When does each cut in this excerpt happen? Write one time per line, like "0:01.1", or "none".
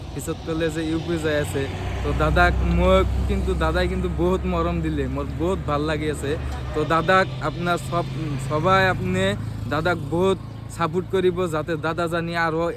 none